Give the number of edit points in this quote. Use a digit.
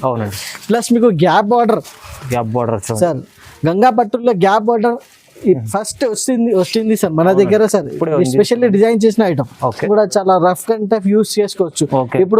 1